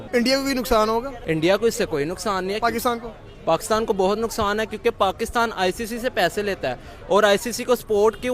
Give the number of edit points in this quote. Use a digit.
1